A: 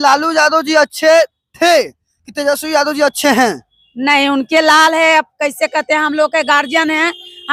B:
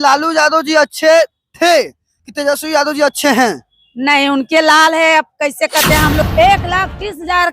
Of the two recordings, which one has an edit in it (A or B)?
B